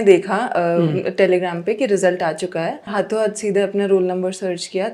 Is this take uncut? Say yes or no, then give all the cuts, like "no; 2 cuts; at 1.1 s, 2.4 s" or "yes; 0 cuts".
no; 1 cut; at 2.9 s